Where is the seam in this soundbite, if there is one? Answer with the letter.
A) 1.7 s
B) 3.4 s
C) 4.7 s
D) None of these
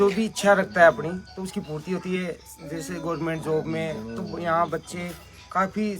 D